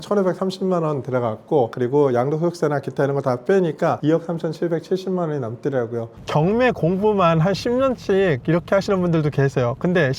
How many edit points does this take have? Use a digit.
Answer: 2